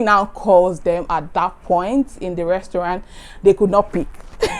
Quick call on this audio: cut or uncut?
uncut